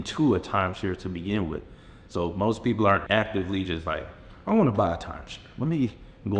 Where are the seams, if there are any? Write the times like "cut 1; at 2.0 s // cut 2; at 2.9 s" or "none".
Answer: cut 1; at 3.0 s